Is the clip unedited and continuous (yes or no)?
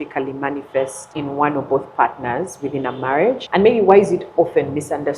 no